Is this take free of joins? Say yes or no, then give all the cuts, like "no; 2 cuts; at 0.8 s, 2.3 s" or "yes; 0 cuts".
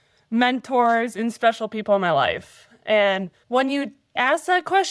no; 2 cuts; at 3.4 s, 4.2 s